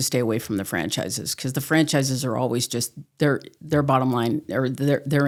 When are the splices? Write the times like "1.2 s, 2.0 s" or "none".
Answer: none